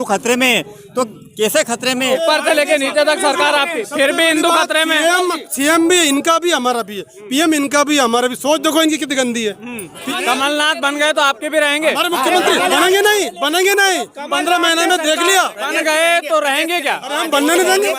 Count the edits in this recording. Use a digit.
2